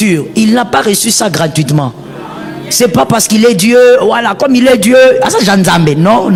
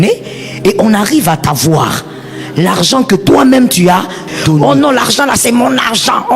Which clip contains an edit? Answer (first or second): second